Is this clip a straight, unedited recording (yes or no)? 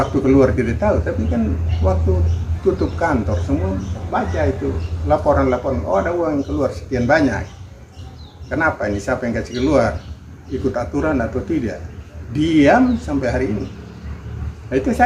yes